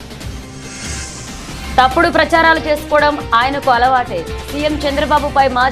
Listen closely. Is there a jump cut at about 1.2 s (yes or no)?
yes